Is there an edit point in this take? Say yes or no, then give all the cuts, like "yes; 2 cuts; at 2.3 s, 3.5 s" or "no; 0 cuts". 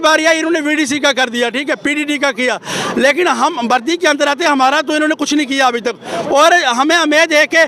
no; 0 cuts